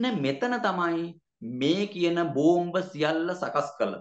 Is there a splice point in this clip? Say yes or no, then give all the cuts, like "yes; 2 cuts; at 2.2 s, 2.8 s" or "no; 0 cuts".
no; 0 cuts